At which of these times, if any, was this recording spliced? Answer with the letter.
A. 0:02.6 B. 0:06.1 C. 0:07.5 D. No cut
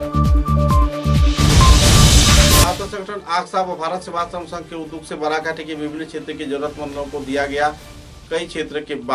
A